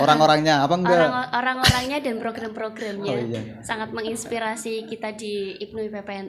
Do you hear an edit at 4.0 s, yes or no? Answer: no